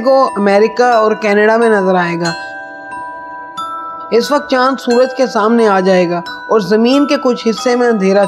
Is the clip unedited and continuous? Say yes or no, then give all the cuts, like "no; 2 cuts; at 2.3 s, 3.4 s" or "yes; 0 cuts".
no; 2 cuts; at 2.5 s, 4.1 s